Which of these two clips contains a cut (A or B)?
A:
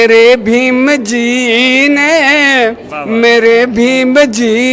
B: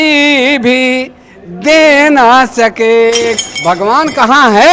B